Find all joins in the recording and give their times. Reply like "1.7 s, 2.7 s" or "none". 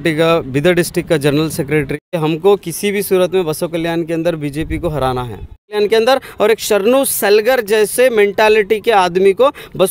2.2 s, 5.8 s

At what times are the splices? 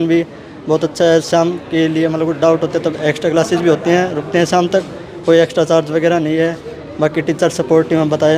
none

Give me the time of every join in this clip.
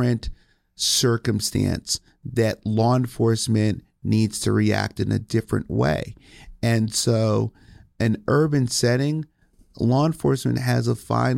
none

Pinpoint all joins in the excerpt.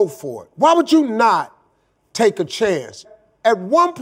3.1 s

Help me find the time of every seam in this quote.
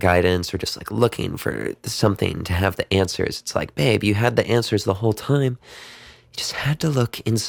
none

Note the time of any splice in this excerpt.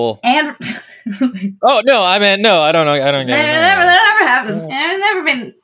4.7 s

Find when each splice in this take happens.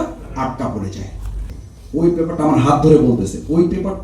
1.5 s

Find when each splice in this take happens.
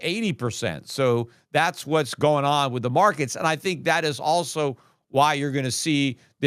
none

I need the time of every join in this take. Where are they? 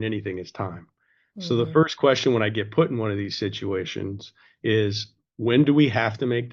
none

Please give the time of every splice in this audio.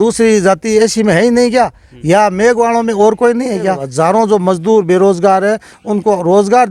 3.8 s

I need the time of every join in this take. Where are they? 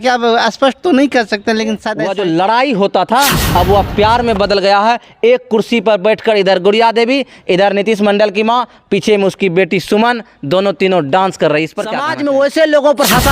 2.0 s, 12.0 s

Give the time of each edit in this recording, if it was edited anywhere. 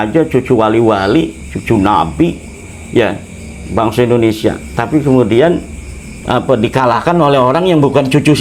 none

